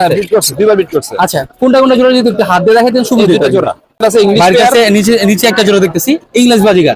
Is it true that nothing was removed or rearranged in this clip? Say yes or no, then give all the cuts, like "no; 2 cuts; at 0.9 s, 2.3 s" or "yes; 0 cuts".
no; 1 cut; at 4.0 s